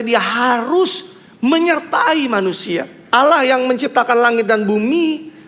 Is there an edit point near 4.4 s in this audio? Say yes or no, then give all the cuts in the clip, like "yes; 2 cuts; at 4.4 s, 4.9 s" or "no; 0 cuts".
no; 1 cut; at 2.9 s